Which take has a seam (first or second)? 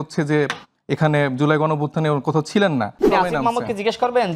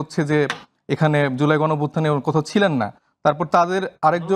first